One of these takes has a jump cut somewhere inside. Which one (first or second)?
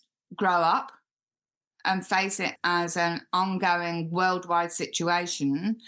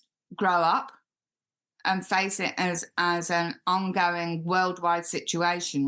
first